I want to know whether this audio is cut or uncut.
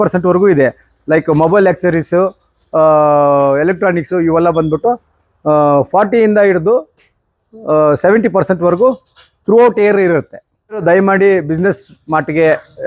cut